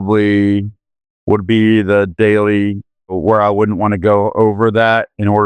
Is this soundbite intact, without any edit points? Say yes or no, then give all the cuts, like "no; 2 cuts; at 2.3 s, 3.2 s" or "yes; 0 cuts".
no; 1 cut; at 3.2 s